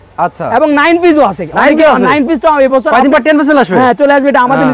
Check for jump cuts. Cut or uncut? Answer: uncut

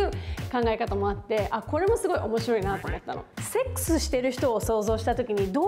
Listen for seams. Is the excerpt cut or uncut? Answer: cut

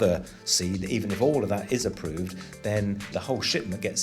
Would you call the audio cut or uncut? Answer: cut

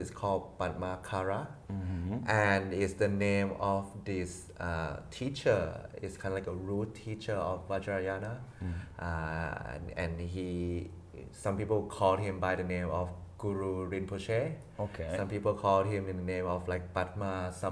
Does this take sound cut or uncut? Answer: uncut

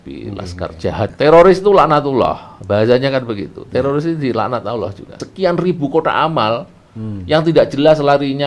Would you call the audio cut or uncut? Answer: cut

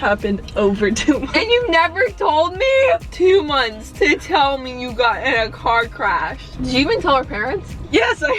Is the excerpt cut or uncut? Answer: cut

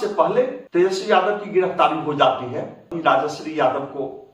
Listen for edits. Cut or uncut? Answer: cut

